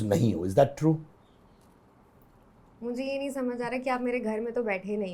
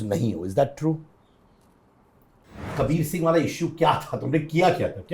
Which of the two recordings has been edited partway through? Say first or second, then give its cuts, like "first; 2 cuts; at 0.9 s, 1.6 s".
second; 1 cut; at 2.6 s